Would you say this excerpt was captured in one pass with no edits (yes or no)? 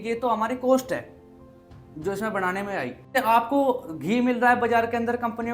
no